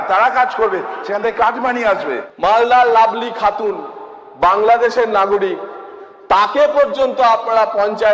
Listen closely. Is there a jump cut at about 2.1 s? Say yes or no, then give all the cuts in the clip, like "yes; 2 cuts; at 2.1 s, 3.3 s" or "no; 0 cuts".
yes; 1 cut; at 2.1 s